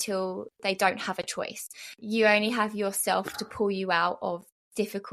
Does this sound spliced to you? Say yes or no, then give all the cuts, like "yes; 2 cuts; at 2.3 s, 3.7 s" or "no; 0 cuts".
yes; 1 cut; at 2.0 s